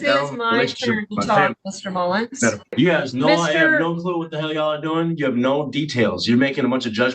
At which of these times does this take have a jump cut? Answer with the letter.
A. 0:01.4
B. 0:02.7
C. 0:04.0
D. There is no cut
B